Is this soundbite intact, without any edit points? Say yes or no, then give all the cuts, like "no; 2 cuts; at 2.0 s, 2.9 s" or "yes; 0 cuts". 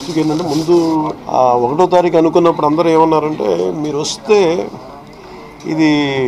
no; 1 cut; at 1.2 s